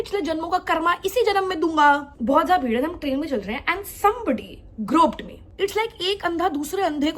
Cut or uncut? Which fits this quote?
cut